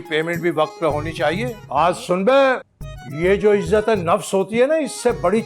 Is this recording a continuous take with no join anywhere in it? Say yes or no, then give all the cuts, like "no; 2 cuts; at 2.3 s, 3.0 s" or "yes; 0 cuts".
no; 1 cut; at 1.6 s